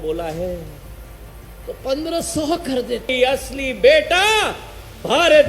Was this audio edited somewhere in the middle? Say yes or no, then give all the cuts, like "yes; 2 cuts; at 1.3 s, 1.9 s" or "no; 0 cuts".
yes; 1 cut; at 3.1 s